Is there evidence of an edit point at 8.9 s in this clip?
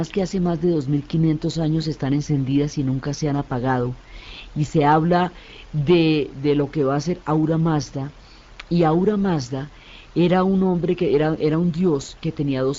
no; 0 cuts

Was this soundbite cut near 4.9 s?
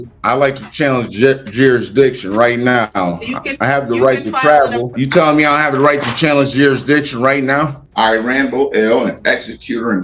yes; 2 cuts; at 4.9 s, 7.8 s

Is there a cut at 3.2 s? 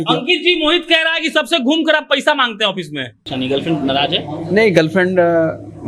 yes; 1 cut; at 3.2 s

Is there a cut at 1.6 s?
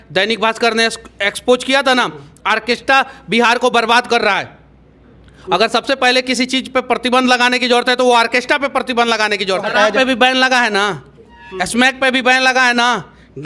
no; 1 cut; at 9.7 s

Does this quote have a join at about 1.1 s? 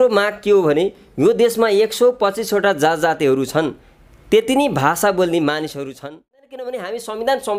no; 1 cut; at 6.5 s

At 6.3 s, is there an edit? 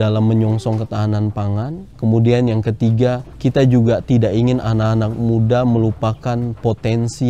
no; 2 cuts; at 1.8 s, 3.3 s

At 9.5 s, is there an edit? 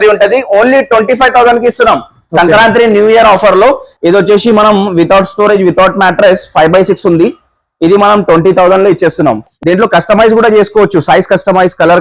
yes; 2 cuts; at 3.9 s, 9.5 s

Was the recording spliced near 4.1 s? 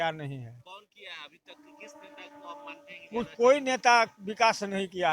no; 0 cuts

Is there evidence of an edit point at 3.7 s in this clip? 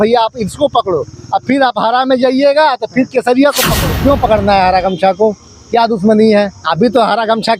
yes; 1 cut; at 3.7 s

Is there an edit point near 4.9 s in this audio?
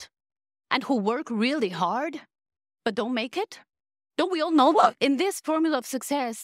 yes; 1 cut; at 4.9 s

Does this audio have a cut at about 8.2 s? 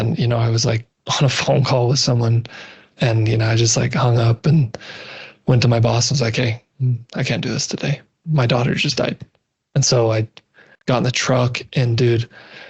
yes; 1 cut; at 8.2 s

